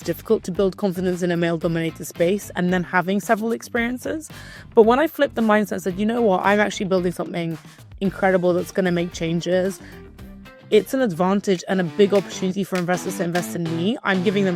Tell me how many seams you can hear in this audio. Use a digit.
0